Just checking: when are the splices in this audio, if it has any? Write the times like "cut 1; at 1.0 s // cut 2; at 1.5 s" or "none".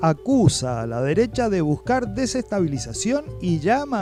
none

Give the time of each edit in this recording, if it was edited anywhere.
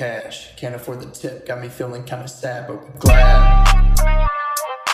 none

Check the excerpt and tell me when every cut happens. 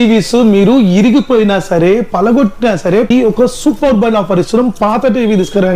cut 1; at 3.1 s

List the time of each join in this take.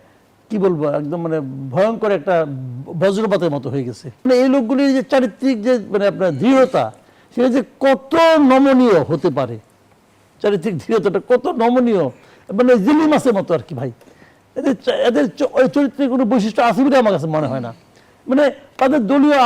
cut 1; at 4.3 s

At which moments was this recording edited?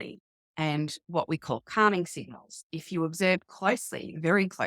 cut 1; at 2.6 s

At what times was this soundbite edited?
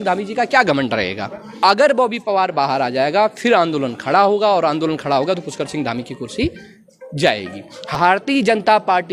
cut 1; at 1.5 s // cut 2; at 7.9 s

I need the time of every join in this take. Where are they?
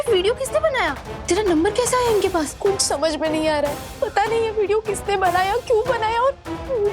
cut 1; at 1.1 s // cut 2; at 2.5 s // cut 3; at 3.8 s

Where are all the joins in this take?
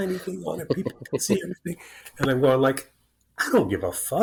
none

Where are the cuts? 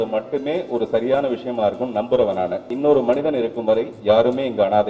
cut 1; at 2.7 s

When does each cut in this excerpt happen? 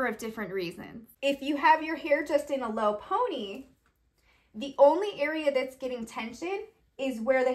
cut 1; at 1.0 s

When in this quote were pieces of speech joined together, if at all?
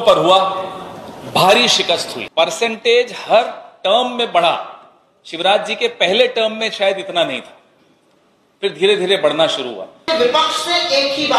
cut 1; at 2.2 s // cut 2; at 10.0 s

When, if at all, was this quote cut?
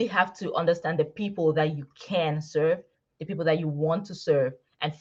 none

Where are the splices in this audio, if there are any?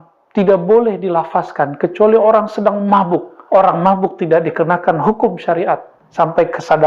cut 1; at 3.3 s // cut 2; at 6.0 s

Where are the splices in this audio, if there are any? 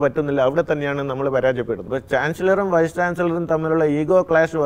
cut 1; at 1.8 s

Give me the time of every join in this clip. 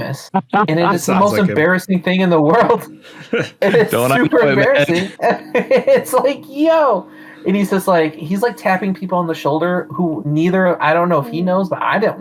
none

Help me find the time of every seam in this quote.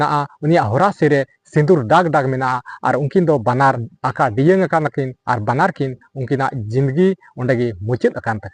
cut 1; at 3.9 s

